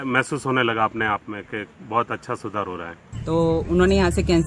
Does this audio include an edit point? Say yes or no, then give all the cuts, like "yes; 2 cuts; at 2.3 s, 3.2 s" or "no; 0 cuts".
yes; 1 cut; at 3.1 s